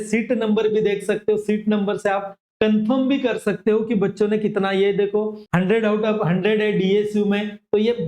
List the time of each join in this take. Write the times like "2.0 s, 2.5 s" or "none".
5.5 s